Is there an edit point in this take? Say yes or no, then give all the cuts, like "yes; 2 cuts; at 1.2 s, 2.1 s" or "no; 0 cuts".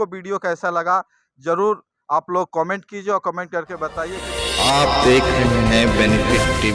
yes; 1 cut; at 4.4 s